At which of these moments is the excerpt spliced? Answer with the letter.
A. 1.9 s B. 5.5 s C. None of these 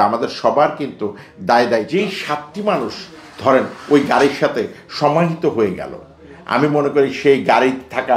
A